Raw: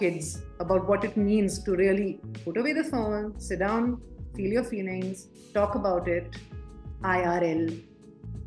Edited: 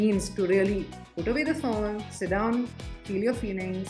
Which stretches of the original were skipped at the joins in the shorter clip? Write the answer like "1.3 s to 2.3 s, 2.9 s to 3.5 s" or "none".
none

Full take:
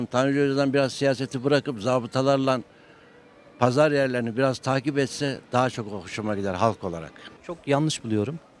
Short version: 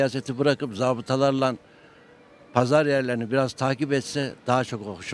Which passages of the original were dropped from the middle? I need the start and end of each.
none

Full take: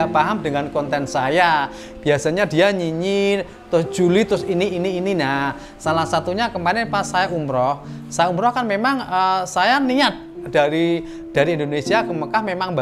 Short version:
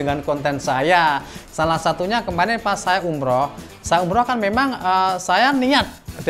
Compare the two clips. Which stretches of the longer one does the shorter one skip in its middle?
1.9 s to 5.7 s

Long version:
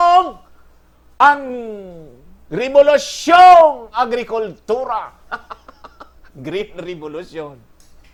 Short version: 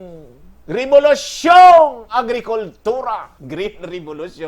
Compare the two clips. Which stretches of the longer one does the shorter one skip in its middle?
5.2 s to 6.3 s

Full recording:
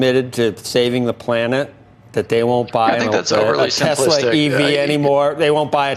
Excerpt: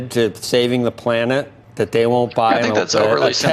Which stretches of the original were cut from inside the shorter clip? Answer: 1.8 s to 2.0 s

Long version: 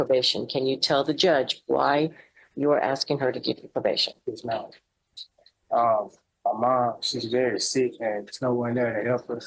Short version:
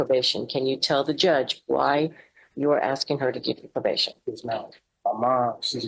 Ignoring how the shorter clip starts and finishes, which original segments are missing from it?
4.8 s to 6.2 s

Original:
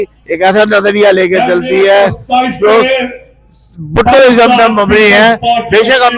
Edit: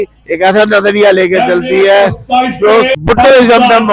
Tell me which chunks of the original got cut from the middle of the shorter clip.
3.0 s to 3.9 s

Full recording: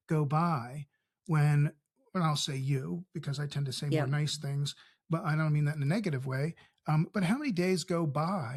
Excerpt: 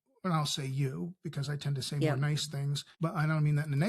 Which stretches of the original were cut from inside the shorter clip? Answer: 4.7 s to 4.9 s

